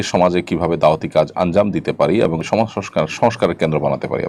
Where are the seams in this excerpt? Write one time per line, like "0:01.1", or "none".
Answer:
0:02.4